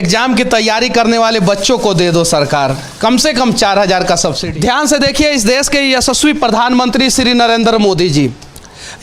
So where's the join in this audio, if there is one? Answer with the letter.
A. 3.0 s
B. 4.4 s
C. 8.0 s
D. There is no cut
B